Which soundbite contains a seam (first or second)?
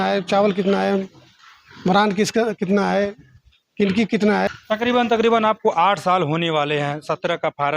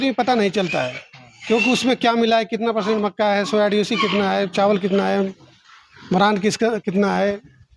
first